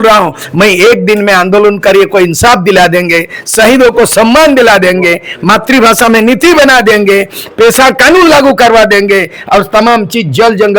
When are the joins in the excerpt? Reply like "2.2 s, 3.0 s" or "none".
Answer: none